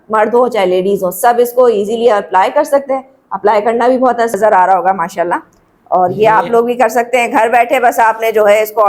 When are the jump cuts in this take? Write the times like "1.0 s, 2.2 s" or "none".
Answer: 4.3 s